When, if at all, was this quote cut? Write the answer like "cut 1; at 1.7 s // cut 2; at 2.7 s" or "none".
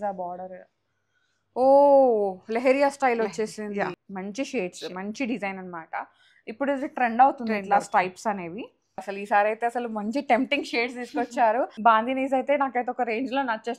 cut 1; at 4.0 s // cut 2; at 9.1 s // cut 3; at 11.8 s